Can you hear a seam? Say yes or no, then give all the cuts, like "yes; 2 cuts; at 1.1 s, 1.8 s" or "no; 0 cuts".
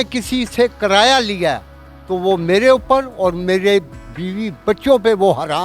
no; 0 cuts